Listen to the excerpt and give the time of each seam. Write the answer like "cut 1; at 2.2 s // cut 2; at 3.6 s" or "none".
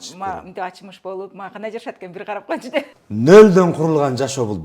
cut 1; at 3.0 s

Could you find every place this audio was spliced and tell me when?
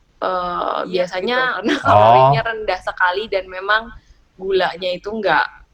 cut 1; at 1.5 s

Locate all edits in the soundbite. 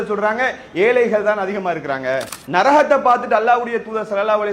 cut 1; at 2.4 s

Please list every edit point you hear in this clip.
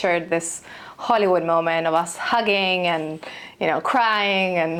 none

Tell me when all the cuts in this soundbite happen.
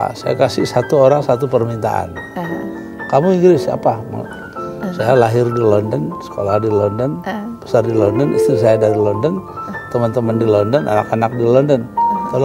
none

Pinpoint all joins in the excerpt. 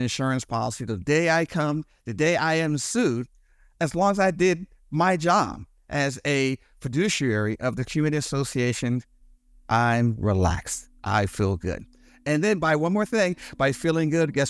none

